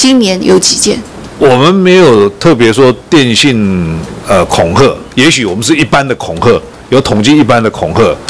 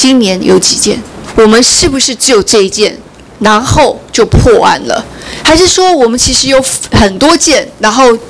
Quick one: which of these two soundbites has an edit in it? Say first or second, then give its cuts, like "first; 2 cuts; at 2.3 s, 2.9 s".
second; 1 cut; at 1.2 s